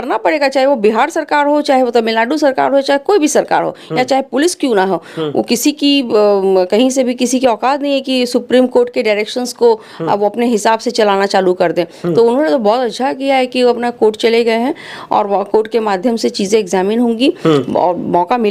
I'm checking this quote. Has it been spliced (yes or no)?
no